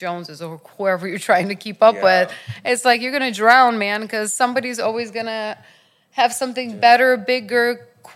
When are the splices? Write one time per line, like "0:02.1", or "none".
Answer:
none